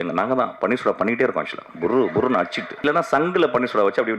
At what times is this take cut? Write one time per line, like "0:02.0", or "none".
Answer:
0:02.8